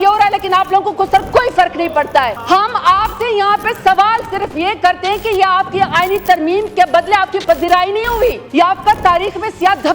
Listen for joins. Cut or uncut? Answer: cut